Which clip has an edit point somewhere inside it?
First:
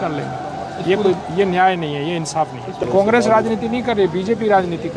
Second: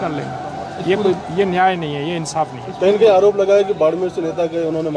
first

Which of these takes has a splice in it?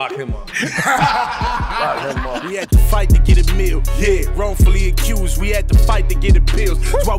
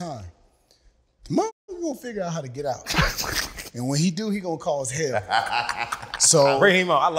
first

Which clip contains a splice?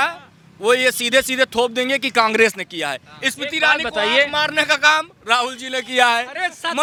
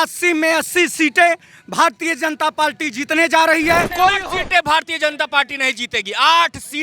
second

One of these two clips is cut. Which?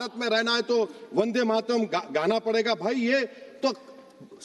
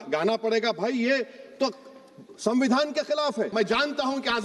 second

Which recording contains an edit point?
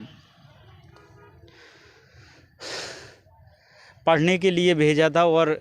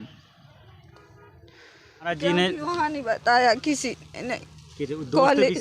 second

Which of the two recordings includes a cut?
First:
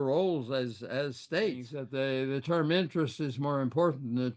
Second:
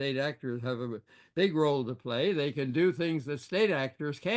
first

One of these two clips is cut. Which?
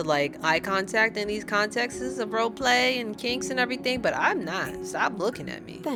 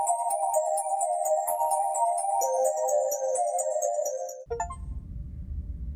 second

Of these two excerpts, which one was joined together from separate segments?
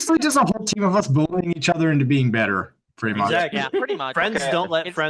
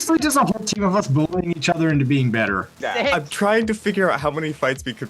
second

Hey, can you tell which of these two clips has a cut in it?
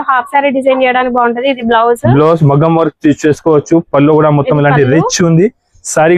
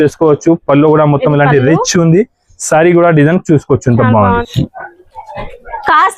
second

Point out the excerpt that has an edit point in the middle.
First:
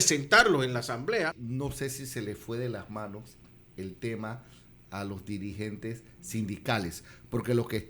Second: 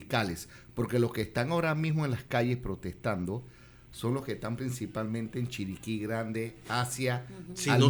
first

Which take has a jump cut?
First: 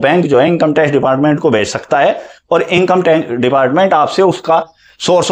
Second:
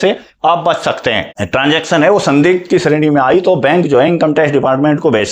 second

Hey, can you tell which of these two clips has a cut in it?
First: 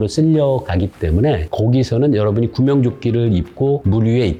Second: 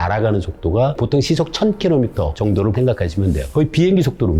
second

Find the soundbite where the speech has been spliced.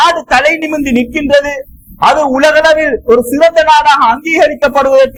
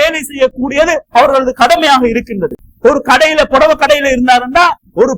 second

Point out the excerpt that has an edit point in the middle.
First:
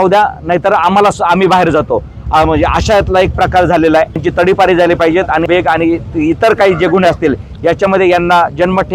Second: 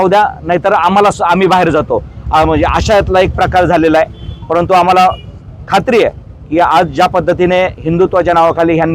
first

